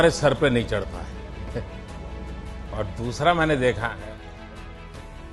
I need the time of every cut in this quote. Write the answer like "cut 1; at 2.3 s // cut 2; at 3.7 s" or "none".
none